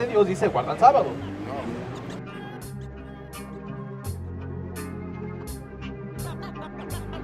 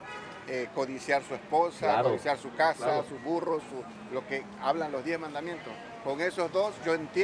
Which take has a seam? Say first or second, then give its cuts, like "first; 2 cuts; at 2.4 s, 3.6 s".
first; 1 cut; at 1.9 s